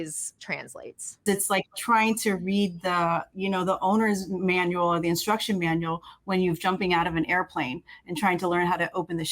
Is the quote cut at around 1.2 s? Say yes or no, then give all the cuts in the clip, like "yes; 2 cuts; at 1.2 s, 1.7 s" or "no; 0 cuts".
yes; 1 cut; at 1.2 s